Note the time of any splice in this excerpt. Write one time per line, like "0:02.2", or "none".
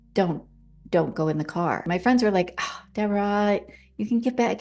0:01.9